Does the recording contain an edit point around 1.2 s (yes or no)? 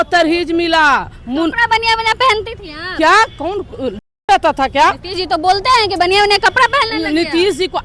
no